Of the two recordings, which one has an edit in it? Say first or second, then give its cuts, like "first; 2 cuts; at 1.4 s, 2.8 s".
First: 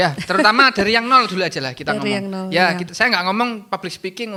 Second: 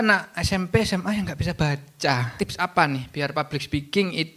second; 1 cut; at 2.3 s